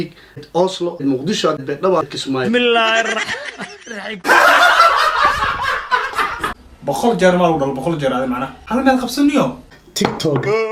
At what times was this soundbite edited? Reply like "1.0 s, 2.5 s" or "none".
none